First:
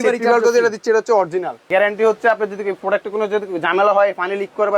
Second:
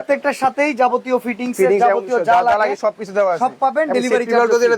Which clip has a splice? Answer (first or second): first